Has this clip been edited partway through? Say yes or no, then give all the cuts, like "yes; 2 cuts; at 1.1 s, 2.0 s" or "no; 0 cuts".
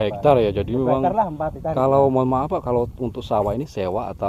no; 0 cuts